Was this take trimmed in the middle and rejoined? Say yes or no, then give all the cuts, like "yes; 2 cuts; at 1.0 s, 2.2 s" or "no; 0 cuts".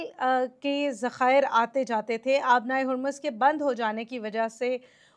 no; 0 cuts